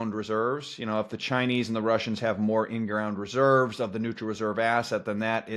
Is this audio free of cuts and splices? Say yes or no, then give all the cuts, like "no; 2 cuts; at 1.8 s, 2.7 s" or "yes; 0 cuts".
yes; 0 cuts